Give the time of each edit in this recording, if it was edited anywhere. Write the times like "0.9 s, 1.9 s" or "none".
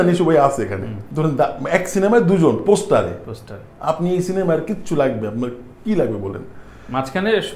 1.0 s